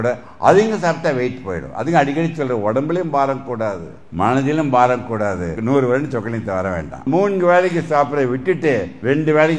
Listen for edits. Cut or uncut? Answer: cut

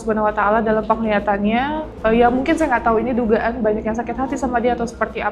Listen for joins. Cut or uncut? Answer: cut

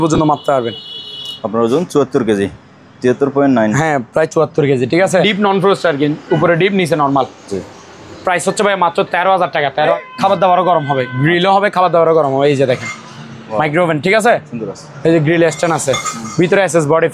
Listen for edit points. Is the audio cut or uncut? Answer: cut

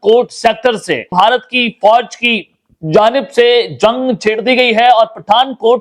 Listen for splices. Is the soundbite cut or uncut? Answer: cut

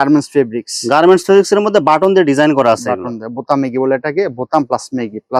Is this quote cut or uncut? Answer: uncut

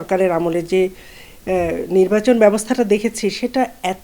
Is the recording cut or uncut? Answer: uncut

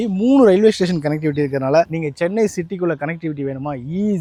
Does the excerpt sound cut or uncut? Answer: uncut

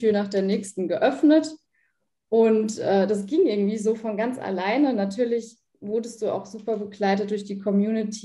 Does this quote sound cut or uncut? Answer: uncut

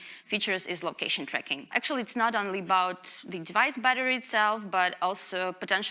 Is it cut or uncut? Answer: cut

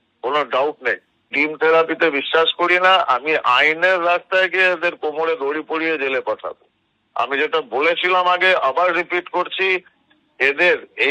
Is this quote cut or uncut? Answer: cut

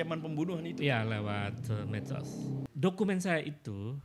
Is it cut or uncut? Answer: cut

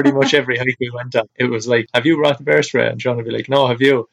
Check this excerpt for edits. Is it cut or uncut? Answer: cut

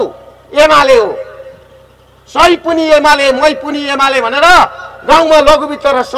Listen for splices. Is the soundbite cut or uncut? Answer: uncut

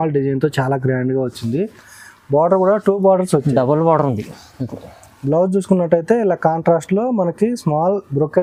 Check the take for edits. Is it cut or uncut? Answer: uncut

